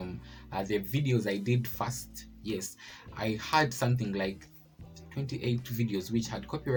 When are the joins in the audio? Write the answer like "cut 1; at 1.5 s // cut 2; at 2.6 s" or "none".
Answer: none

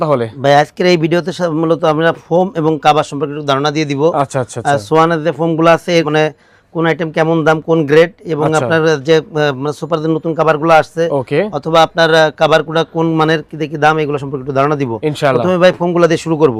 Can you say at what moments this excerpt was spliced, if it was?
none

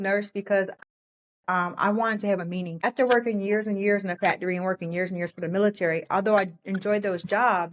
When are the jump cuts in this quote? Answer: cut 1; at 2.8 s

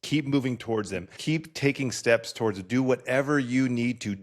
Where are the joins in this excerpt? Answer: cut 1; at 1.1 s

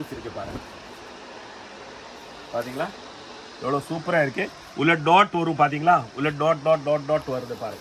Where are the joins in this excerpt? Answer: none

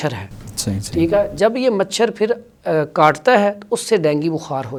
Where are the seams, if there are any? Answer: none

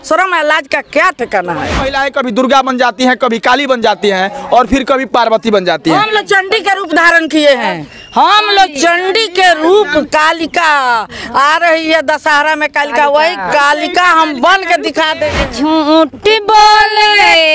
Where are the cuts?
cut 1; at 1.9 s // cut 2; at 15.4 s

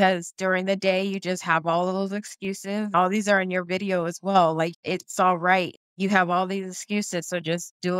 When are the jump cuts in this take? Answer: cut 1; at 2.9 s // cut 2; at 4.7 s // cut 3; at 5.7 s

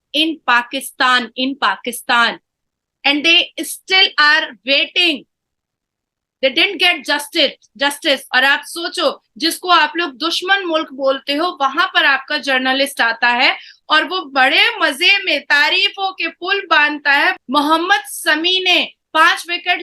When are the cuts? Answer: cut 1; at 8.2 s // cut 2; at 17.4 s

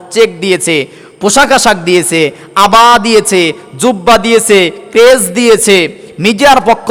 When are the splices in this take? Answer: none

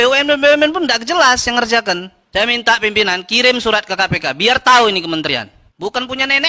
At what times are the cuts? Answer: cut 1; at 2.1 s // cut 2; at 5.6 s

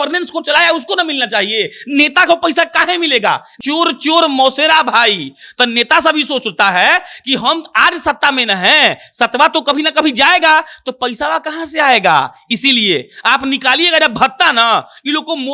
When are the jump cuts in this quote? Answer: cut 1; at 3.5 s

